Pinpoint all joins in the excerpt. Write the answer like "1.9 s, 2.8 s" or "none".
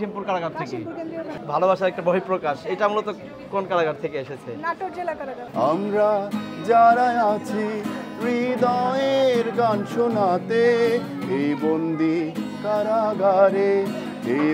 1.3 s, 5.4 s